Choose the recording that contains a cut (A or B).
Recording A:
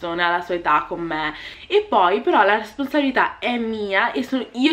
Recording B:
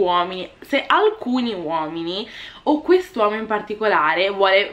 A